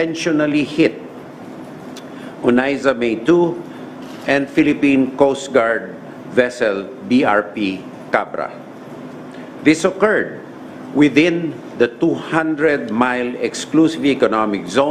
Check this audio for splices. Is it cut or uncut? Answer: uncut